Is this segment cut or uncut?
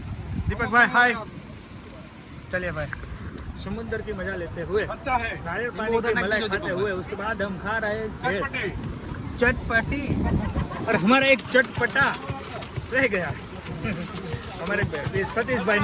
uncut